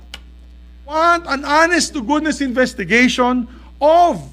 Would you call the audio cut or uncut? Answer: cut